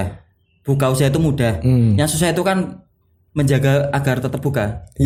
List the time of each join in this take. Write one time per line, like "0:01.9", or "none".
none